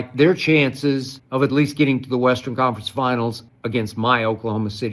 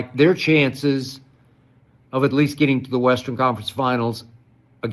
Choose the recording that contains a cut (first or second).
first